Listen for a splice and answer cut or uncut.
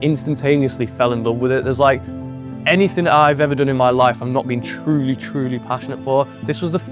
uncut